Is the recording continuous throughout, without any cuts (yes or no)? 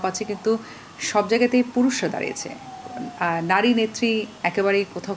yes